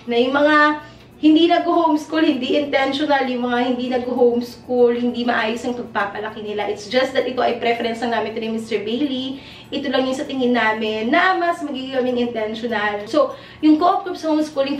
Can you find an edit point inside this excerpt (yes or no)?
yes